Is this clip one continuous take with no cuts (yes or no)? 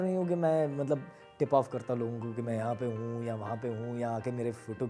yes